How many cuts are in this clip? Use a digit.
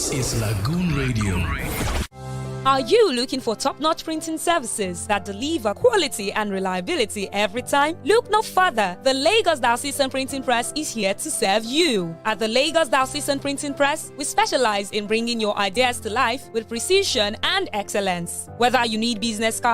1